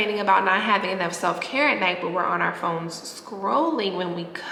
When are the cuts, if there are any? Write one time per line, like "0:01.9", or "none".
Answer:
none

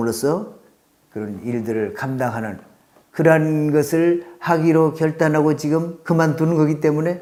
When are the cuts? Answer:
none

